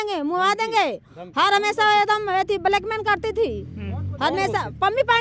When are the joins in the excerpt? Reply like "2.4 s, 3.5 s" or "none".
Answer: none